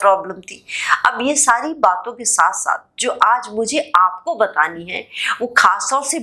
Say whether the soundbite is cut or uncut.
uncut